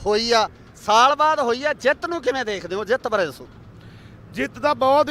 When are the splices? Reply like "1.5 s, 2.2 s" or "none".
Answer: 1.1 s, 2.8 s